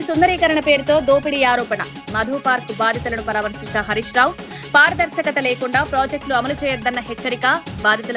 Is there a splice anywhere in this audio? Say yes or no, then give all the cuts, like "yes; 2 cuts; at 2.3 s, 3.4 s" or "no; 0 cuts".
no; 0 cuts